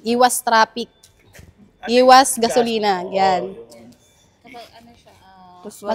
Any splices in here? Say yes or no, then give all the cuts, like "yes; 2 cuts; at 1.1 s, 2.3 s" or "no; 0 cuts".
no; 0 cuts